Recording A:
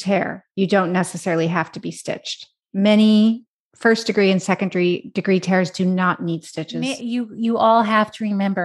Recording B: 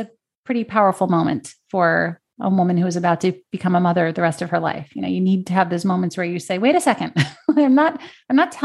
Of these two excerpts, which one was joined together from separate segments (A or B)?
A